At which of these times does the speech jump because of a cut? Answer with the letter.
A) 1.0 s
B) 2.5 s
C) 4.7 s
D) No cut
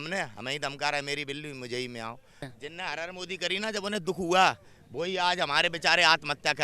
B